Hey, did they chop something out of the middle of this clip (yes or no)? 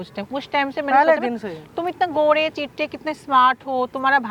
no